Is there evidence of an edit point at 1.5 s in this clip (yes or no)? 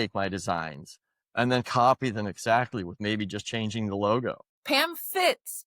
no